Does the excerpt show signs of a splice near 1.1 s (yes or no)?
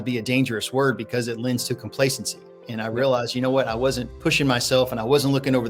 no